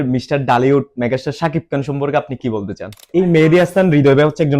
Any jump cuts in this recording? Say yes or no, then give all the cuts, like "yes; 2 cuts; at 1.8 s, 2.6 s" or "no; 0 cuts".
yes; 1 cut; at 3.1 s